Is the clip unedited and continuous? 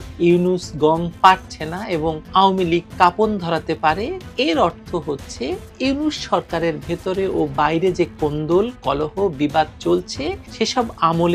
yes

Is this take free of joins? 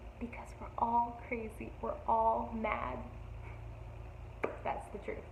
yes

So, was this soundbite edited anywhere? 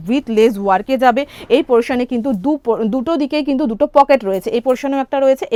no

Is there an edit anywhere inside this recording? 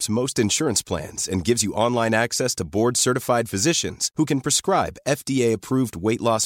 no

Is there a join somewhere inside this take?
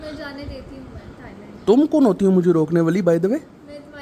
no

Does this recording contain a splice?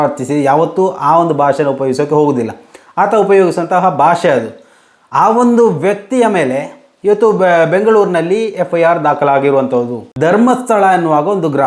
yes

